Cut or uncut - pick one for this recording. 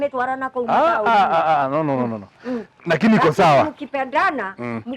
cut